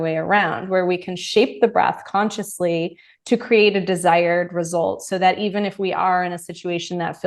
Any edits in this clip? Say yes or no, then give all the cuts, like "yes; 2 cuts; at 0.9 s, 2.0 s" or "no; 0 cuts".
no; 0 cuts